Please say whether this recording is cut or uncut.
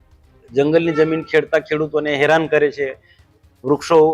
uncut